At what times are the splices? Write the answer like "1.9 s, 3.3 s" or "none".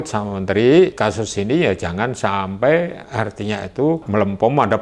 0.9 s, 3.0 s, 4.0 s